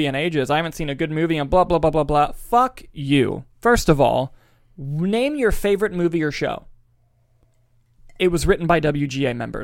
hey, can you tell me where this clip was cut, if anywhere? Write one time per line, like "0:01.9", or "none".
none